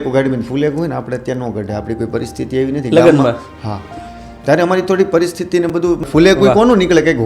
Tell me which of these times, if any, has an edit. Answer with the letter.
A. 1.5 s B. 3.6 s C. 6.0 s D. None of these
C